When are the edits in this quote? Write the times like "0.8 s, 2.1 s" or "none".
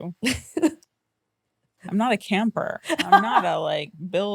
none